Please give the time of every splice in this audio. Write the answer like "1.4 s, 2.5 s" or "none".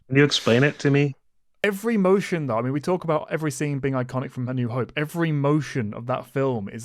1.6 s